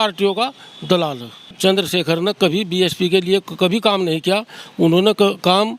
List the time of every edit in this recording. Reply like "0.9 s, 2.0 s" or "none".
1.5 s